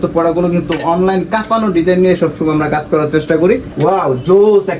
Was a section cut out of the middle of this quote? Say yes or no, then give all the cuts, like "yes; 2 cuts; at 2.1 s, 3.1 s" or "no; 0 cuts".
yes; 1 cut; at 3.7 s